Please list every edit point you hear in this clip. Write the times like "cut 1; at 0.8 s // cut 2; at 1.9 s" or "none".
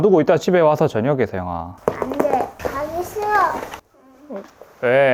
cut 1; at 1.7 s // cut 2; at 2.6 s